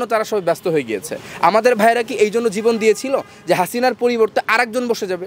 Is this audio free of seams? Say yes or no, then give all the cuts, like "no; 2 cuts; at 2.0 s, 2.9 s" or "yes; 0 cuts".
yes; 0 cuts